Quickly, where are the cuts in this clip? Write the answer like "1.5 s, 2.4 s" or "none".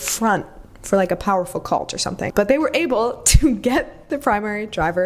none